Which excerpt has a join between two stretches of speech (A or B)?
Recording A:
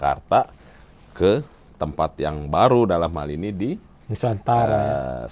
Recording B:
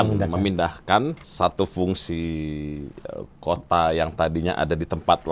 B